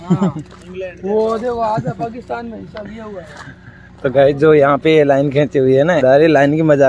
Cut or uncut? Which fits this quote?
uncut